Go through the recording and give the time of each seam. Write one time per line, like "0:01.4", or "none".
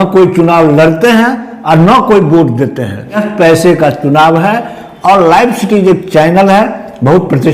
0:03.2